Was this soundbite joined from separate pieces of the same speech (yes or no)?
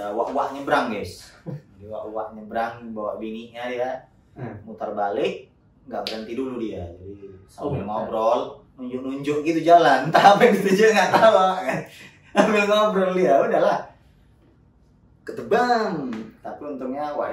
no